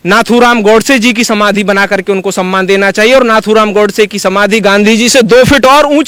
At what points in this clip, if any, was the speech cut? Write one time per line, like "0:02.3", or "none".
none